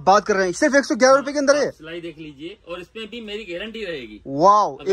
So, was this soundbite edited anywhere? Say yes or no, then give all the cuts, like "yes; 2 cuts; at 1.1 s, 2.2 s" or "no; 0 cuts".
no; 0 cuts